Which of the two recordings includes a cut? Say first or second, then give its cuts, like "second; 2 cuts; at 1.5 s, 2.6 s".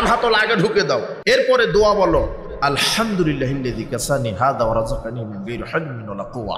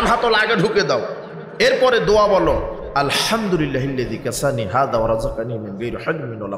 first; 1 cut; at 1.1 s